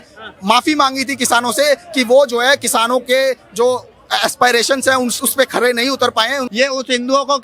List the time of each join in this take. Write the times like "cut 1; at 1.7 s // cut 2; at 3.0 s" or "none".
cut 1; at 6.5 s

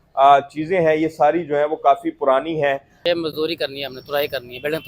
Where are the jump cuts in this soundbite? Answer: cut 1; at 2.9 s

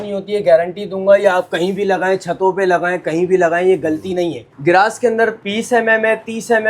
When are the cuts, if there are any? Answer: cut 1; at 4.5 s // cut 2; at 5.4 s

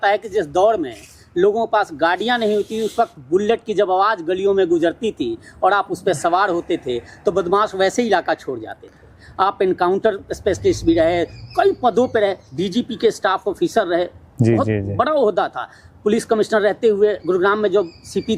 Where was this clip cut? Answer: none

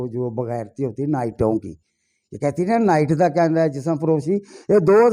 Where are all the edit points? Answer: none

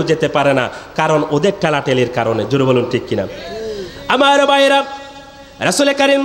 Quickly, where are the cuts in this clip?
none

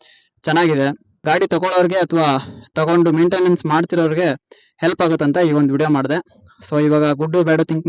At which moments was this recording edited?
cut 1; at 1.2 s

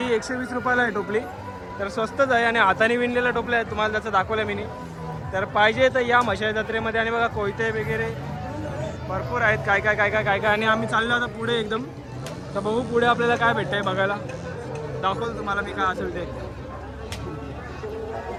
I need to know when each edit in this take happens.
none

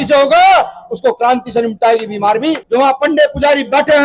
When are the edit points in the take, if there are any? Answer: cut 1; at 2.6 s

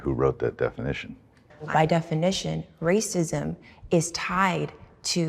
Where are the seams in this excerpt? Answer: cut 1; at 1.5 s

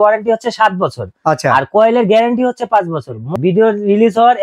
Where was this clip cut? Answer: cut 1; at 3.3 s

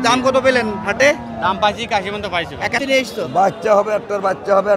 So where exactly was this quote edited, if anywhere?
cut 1; at 2.8 s

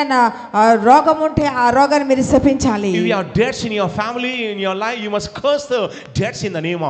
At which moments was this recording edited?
none

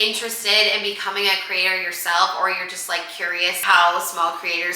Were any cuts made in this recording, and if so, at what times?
cut 1; at 3.6 s

